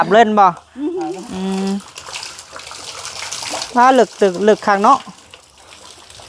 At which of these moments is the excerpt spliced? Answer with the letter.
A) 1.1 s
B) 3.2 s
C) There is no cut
A